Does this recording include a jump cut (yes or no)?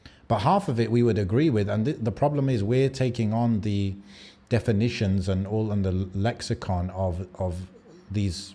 no